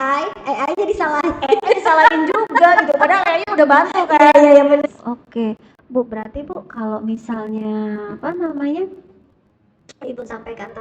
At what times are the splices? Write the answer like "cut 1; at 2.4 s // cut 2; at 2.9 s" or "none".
cut 1; at 4.8 s